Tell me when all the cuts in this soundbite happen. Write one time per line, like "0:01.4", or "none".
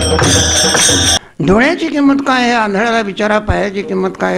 0:01.1